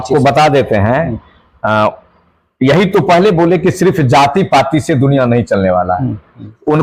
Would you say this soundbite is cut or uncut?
uncut